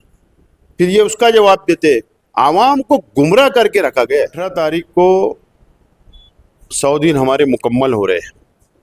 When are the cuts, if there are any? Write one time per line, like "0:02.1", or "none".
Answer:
0:04.5